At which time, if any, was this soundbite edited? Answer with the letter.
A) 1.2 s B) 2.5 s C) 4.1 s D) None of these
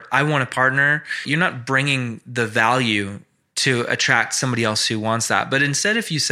A